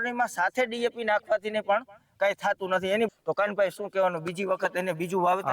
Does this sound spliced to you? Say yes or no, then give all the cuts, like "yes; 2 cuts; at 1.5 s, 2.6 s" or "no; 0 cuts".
yes; 1 cut; at 3.1 s